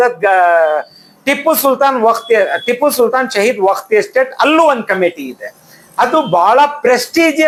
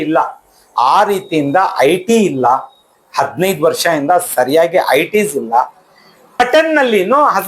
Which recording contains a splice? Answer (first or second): second